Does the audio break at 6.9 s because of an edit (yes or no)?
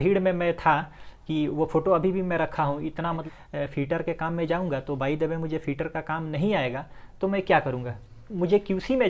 no